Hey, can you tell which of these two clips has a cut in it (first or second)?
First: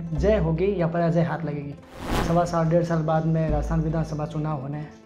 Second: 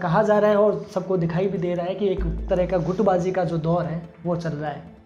first